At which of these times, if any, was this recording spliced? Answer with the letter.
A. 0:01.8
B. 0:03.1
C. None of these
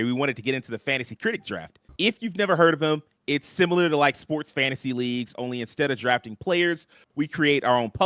A